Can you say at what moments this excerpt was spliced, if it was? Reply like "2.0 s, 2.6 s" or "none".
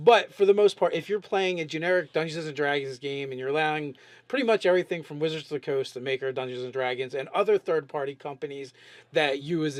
none